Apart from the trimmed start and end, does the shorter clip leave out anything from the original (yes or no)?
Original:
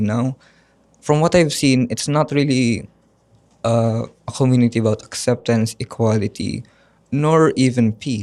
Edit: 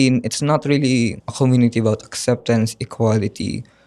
yes